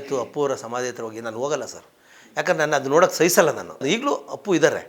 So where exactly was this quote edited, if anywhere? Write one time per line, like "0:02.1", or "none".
0:03.8